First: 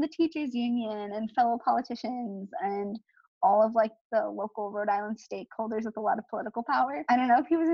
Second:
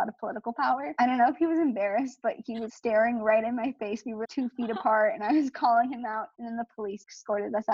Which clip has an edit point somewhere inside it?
second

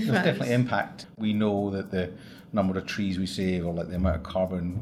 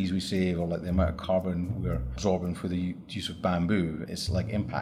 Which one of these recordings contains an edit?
first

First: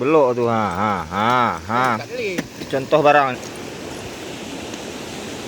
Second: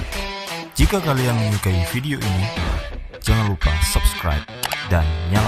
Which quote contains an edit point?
first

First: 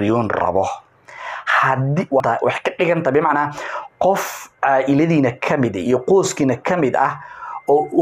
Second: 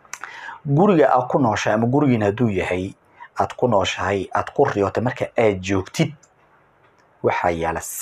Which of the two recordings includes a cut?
first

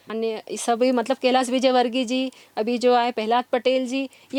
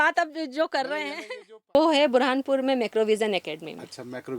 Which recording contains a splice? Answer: second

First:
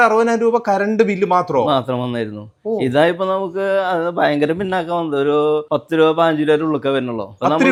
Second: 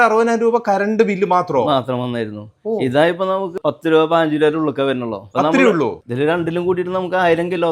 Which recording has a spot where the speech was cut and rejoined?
second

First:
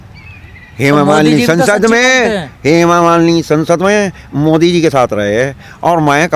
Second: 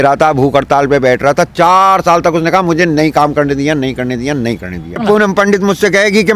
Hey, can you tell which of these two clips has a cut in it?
second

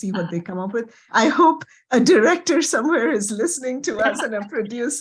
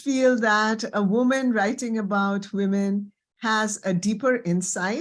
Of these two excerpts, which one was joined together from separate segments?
first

